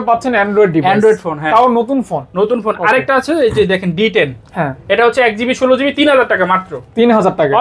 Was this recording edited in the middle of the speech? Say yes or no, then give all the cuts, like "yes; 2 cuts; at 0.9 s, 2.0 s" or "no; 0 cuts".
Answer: no; 0 cuts